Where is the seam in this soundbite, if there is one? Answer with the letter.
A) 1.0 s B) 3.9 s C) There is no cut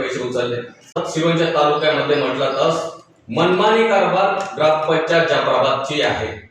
A